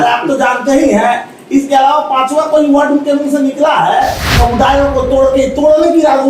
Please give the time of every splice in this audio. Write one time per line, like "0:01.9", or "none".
0:04.3